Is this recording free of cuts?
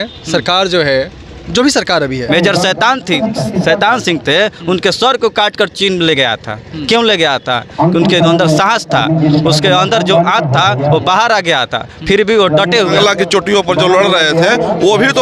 no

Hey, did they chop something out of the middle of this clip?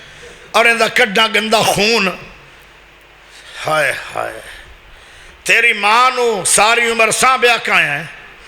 no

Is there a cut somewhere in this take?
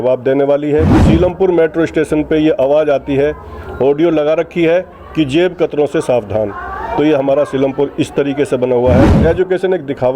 yes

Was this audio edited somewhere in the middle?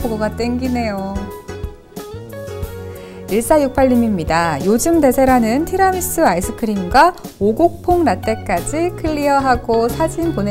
yes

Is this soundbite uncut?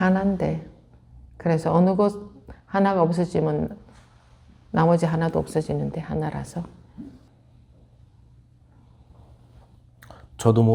no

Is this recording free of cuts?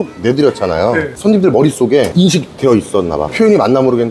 yes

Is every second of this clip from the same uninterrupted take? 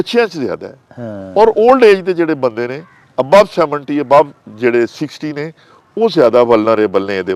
yes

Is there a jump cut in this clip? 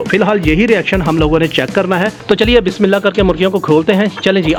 no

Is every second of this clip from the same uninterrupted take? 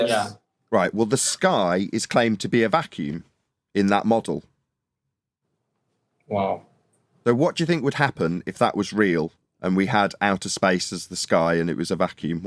yes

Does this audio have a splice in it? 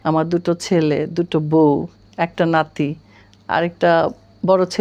no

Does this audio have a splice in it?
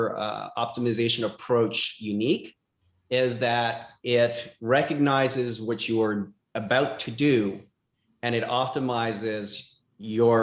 no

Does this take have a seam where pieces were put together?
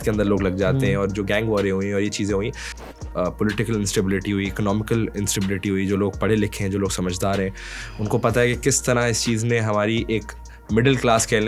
yes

